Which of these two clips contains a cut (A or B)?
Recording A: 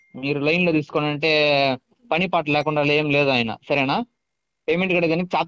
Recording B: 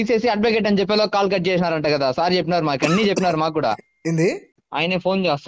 B